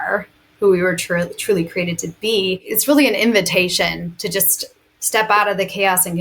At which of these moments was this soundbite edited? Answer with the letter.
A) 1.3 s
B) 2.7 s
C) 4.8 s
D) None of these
B